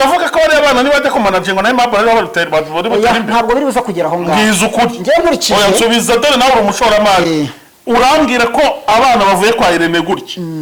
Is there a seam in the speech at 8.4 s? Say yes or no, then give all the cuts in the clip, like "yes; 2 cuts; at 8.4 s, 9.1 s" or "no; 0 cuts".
no; 0 cuts